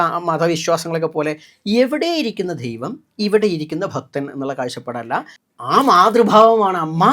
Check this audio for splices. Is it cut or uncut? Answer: cut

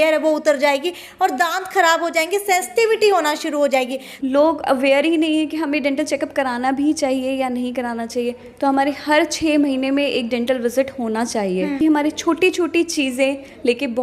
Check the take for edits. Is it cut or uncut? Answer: cut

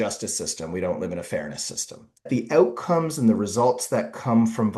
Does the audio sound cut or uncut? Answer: cut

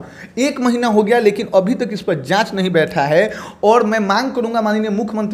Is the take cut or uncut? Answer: uncut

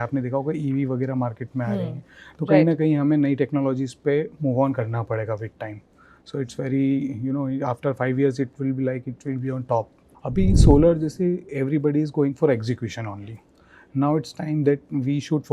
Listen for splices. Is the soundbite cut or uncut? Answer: cut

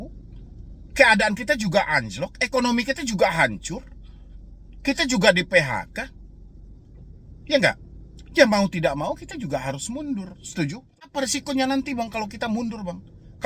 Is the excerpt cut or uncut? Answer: cut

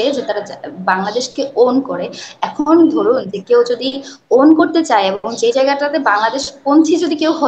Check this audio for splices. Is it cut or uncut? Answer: uncut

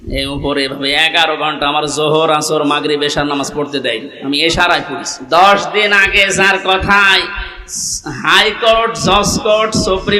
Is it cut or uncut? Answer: cut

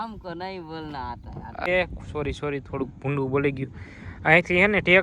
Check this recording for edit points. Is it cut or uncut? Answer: cut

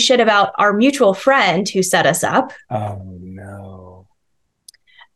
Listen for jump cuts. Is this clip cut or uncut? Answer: uncut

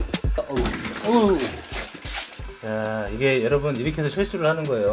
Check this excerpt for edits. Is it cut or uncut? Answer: uncut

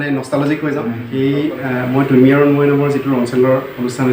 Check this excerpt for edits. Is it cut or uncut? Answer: cut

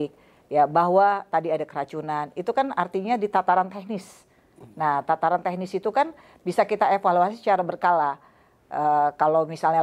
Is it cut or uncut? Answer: uncut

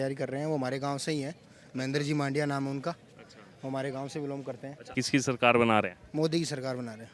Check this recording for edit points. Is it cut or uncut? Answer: cut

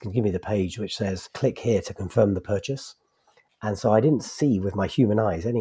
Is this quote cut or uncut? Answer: cut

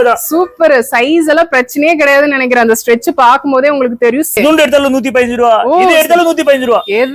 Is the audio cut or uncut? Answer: cut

